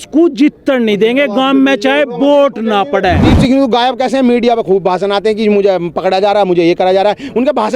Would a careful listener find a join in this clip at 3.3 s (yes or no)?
yes